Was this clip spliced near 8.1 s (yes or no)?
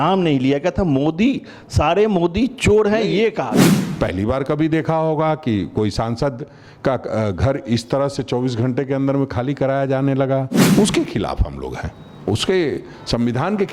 no